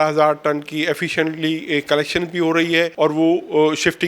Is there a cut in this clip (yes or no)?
yes